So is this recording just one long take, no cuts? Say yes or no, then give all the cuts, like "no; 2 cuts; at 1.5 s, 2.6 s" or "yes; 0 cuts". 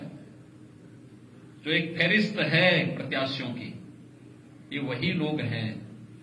yes; 0 cuts